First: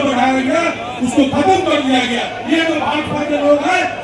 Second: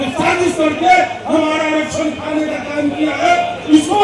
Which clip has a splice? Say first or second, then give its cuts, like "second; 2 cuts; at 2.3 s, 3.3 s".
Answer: first; 1 cut; at 2.3 s